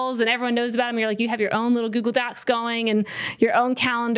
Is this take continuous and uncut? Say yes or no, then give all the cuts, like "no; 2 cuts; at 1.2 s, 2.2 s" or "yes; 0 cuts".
yes; 0 cuts